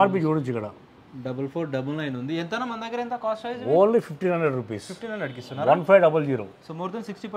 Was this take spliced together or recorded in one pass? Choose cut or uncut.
uncut